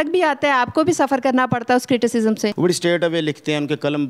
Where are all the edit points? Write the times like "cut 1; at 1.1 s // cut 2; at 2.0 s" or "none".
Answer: cut 1; at 2.5 s